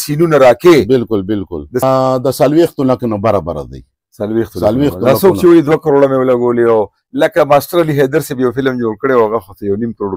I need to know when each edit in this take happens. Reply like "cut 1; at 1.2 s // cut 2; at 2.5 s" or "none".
cut 1; at 1.8 s

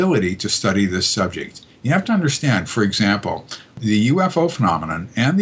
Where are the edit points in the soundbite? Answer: cut 1; at 3.8 s

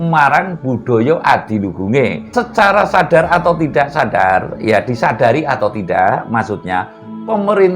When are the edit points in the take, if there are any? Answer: cut 1; at 2.2 s

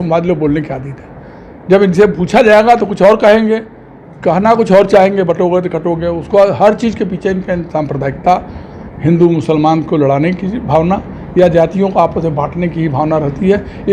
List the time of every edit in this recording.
none

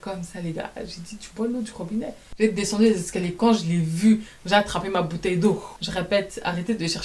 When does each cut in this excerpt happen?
cut 1; at 2.2 s // cut 2; at 5.8 s

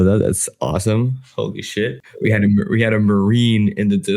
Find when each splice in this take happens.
cut 1; at 2.0 s

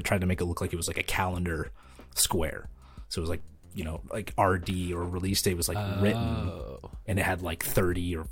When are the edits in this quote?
none

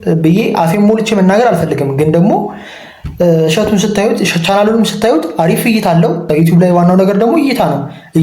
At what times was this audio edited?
cut 1; at 6.3 s

